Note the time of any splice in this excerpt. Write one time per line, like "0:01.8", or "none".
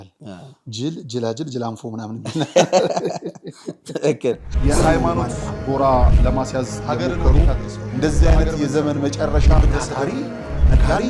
0:04.5